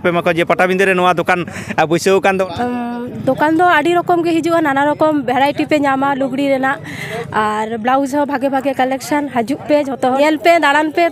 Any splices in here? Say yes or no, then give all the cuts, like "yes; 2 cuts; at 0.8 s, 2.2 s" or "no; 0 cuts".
yes; 2 cuts; at 2.5 s, 10.2 s